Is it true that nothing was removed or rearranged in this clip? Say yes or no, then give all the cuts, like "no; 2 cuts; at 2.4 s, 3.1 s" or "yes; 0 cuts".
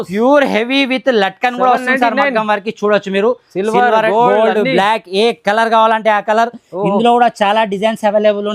yes; 0 cuts